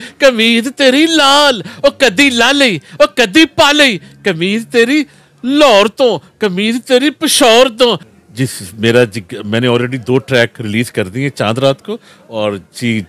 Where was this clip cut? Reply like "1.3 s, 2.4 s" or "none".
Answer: 8.1 s

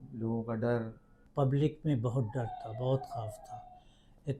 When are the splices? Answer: 1.2 s

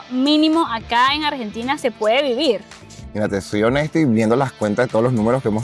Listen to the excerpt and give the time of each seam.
none

